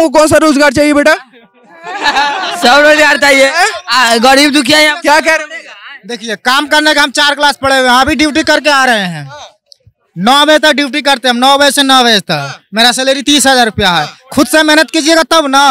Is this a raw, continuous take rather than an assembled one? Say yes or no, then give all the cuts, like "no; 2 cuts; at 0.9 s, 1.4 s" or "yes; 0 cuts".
yes; 0 cuts